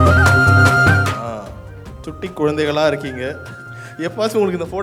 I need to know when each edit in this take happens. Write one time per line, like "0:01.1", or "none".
none